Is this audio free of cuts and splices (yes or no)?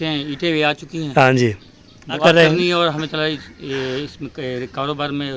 no